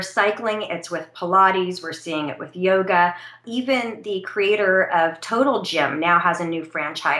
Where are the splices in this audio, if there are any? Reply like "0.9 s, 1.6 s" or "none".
3.4 s